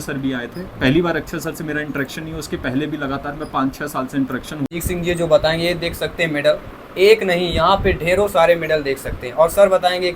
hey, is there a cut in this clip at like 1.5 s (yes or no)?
no